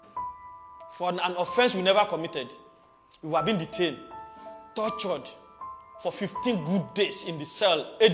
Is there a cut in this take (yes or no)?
yes